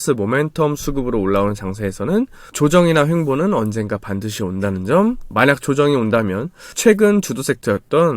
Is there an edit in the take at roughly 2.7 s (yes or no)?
no